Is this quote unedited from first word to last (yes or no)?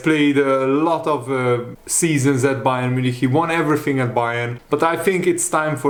yes